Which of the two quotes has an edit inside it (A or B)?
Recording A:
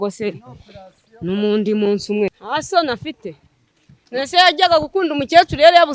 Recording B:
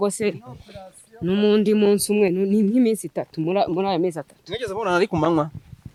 A